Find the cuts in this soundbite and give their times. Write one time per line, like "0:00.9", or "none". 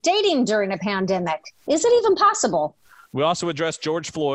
none